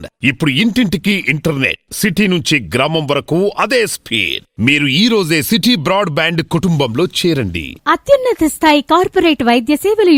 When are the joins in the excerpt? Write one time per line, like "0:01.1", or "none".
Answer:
none